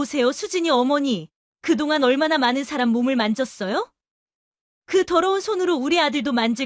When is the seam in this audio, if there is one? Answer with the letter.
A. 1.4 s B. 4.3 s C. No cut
C